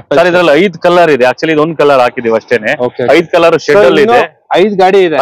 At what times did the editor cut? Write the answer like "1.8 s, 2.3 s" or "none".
none